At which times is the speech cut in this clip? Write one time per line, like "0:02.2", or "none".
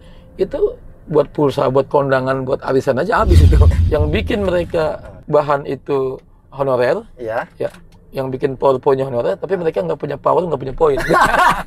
0:03.7